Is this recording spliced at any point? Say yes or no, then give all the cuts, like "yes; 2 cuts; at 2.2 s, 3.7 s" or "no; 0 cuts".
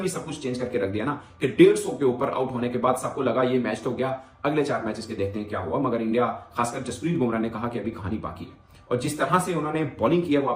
no; 0 cuts